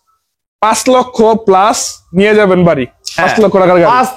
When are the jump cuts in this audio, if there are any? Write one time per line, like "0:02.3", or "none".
none